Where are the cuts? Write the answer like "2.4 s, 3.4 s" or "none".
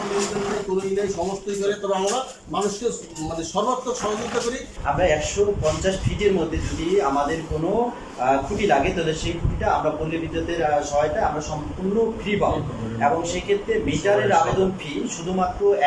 4.8 s